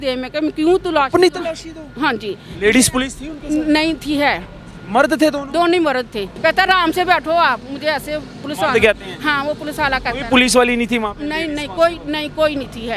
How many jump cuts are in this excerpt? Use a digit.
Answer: 1